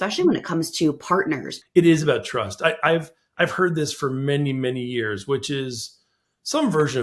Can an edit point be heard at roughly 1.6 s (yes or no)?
yes